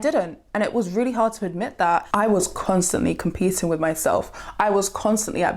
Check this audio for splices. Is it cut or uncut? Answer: cut